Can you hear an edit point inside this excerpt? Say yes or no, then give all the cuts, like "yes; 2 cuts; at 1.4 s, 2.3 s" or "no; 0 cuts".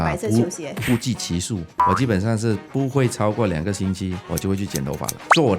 yes; 2 cuts; at 1.7 s, 4.2 s